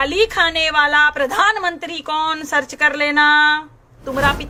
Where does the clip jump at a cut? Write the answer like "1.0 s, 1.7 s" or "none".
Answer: none